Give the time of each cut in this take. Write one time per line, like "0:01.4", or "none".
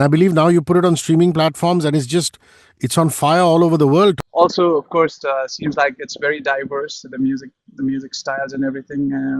0:04.2